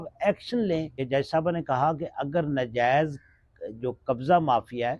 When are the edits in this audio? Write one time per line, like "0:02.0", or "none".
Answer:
0:01.0